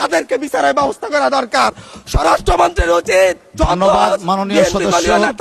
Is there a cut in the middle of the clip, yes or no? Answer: no